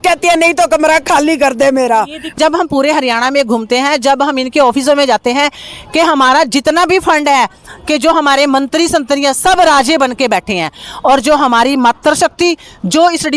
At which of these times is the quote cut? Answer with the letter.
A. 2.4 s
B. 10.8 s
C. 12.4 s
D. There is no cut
A